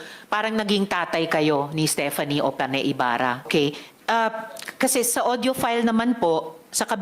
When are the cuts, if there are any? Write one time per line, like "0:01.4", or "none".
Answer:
0:03.5